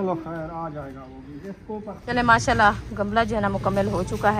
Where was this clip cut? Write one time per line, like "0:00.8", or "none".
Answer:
0:02.0